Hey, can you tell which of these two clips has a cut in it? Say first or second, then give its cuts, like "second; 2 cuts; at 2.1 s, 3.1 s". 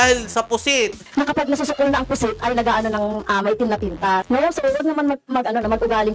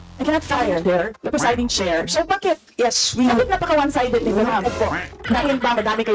first; 2 cuts; at 1.1 s, 4.2 s